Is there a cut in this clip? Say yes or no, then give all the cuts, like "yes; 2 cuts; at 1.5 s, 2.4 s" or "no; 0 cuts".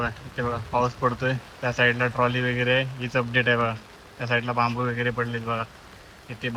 no; 0 cuts